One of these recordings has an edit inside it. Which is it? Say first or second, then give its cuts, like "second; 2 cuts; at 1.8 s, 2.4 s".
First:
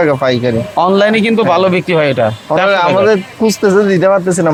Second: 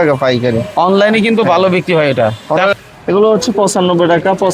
second; 1 cut; at 2.7 s